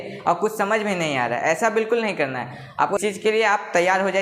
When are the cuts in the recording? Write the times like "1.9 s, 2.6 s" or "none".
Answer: 3.0 s